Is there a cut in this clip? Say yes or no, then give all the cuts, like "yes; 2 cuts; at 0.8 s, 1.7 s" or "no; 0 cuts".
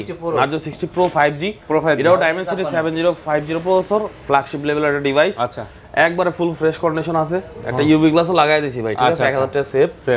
no; 0 cuts